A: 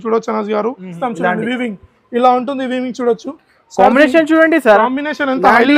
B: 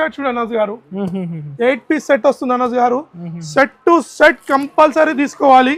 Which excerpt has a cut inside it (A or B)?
A